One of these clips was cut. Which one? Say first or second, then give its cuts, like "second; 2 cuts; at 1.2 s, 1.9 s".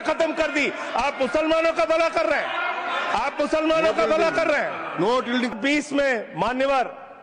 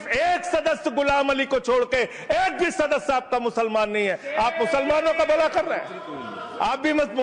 first; 1 cut; at 5.5 s